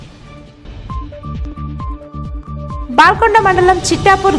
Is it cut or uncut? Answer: cut